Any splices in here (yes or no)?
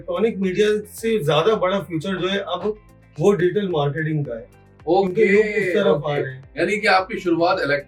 no